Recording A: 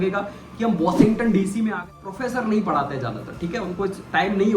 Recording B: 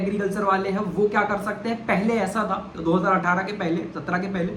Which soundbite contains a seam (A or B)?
A